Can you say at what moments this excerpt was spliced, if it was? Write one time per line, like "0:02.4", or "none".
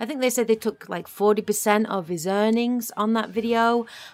none